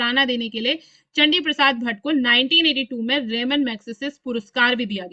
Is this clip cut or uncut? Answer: uncut